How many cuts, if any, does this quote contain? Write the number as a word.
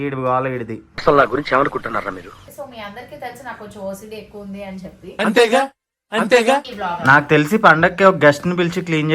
two